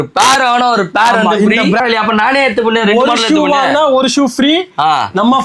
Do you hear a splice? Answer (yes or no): yes